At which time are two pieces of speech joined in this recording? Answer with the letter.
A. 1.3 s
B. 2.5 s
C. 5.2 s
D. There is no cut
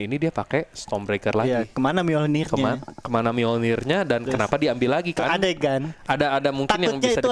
C